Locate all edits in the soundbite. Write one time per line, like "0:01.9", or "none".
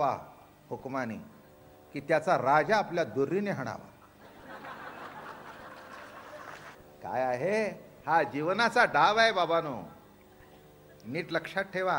0:06.7